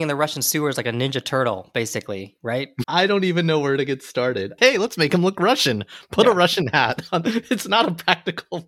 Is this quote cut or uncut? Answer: cut